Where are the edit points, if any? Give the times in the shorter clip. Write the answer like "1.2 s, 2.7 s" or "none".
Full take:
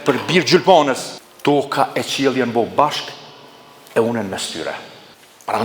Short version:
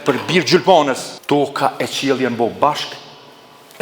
1.1 s